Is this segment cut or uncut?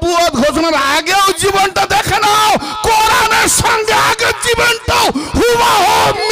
uncut